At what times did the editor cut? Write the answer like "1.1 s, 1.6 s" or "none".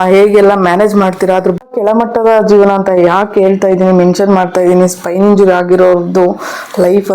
1.6 s